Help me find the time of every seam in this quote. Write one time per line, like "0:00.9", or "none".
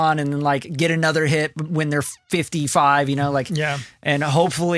none